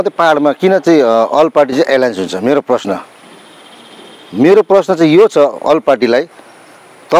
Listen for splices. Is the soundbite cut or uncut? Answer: uncut